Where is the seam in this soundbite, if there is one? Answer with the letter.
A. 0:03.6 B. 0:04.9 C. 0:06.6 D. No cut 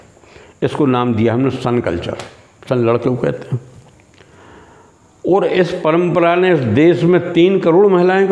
D